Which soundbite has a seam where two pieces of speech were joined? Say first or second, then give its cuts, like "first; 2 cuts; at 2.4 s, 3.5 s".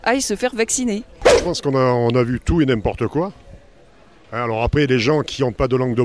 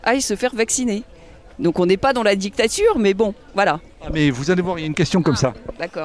first; 1 cut; at 1.3 s